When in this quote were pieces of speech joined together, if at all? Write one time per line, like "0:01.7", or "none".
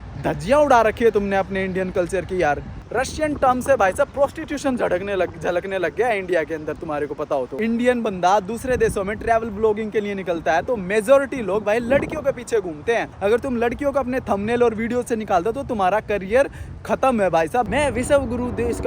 0:02.8
0:07.5
0:13.1
0:17.7